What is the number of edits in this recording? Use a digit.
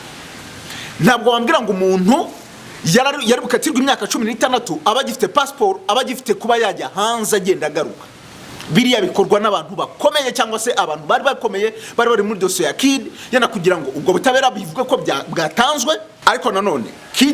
1